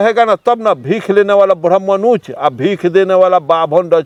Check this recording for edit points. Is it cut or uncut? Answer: uncut